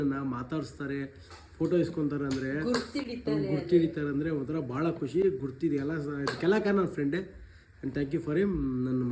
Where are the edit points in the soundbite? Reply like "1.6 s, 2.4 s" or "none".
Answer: none